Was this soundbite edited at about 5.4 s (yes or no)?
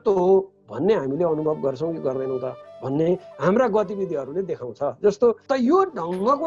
yes